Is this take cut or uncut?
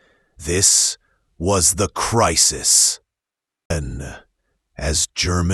cut